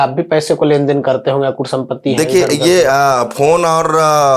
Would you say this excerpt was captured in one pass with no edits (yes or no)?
yes